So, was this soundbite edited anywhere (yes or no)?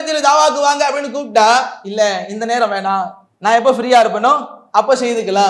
yes